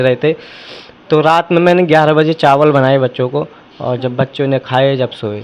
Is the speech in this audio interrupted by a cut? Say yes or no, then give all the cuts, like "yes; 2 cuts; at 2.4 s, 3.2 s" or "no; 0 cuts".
no; 0 cuts